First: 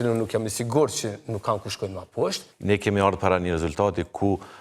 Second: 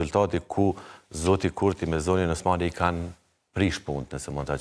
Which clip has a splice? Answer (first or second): first